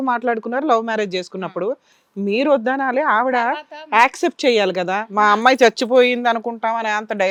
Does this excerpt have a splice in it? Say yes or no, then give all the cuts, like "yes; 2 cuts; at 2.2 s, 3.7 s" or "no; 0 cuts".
no; 0 cuts